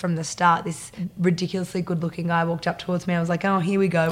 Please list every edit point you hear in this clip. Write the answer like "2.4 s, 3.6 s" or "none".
1.0 s